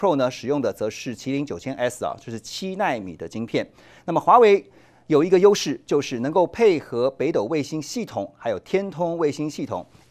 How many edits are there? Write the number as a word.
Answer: zero